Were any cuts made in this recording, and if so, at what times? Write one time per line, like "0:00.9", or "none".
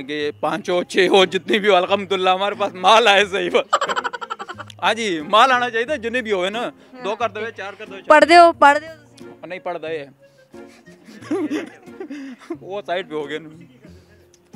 none